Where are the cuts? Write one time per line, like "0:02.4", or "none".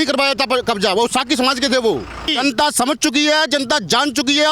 0:02.3